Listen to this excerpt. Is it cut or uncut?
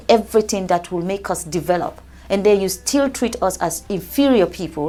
uncut